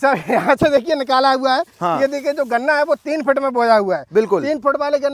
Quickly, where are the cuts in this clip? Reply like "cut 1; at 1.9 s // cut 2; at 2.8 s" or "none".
none

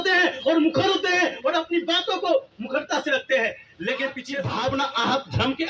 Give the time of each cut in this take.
cut 1; at 4.3 s

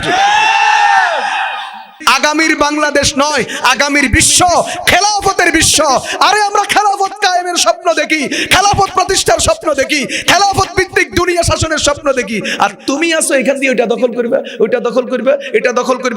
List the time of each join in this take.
cut 1; at 1.9 s

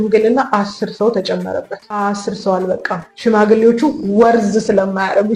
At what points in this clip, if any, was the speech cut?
cut 1; at 1.8 s

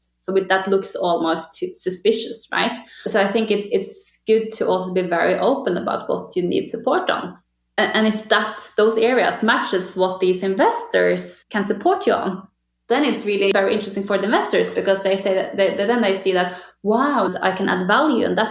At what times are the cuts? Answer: cut 1; at 2.9 s // cut 2; at 7.4 s // cut 3; at 11.4 s // cut 4; at 13.5 s // cut 5; at 17.3 s

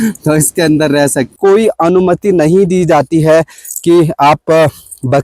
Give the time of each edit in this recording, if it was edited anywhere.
cut 1; at 1.4 s

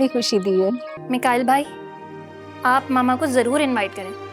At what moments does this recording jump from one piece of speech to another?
cut 1; at 0.9 s

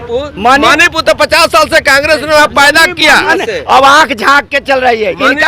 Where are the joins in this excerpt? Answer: cut 1; at 3.3 s

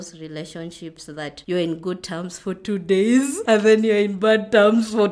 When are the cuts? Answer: cut 1; at 1.4 s // cut 2; at 3.4 s

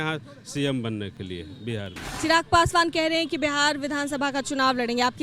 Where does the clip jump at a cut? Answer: cut 1; at 2.0 s

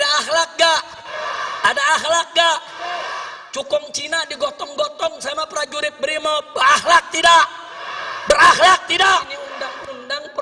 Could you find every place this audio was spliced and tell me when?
cut 1; at 9.4 s

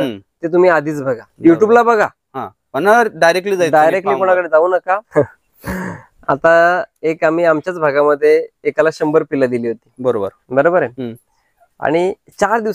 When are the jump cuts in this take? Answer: cut 1; at 1.3 s // cut 2; at 5.1 s

